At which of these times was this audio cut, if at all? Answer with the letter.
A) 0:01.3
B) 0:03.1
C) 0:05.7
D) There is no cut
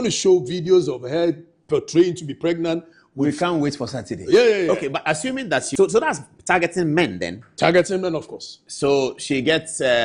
C